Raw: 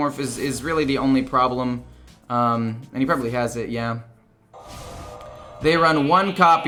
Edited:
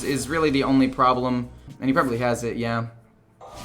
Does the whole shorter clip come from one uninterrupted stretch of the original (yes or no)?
no